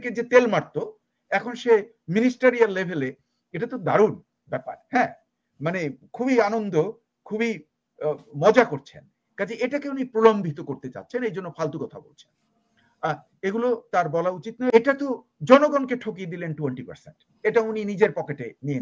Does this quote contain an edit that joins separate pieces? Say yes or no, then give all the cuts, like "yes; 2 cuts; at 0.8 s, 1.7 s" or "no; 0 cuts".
yes; 1 cut; at 14.7 s